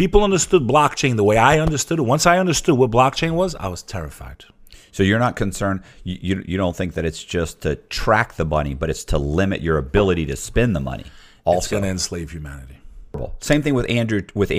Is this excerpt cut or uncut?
cut